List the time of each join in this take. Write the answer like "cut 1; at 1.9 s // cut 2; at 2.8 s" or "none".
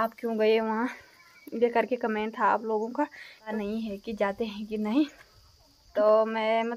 cut 1; at 3.5 s // cut 2; at 5.8 s